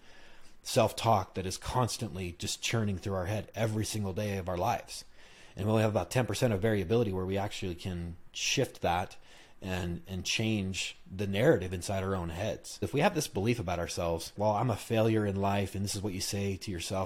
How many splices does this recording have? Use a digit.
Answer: 2